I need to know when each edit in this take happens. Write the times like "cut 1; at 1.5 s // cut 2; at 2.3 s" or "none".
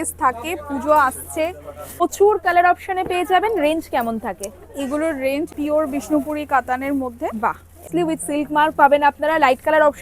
cut 1; at 2.0 s // cut 2; at 5.5 s // cut 3; at 7.9 s